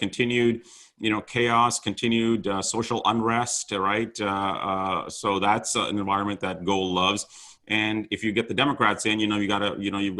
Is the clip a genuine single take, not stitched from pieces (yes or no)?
yes